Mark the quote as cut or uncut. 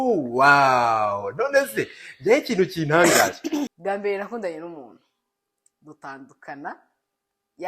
cut